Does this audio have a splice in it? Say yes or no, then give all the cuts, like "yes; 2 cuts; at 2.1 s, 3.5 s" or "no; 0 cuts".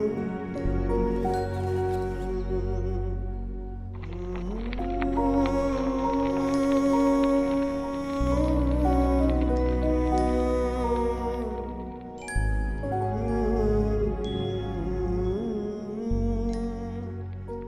no; 0 cuts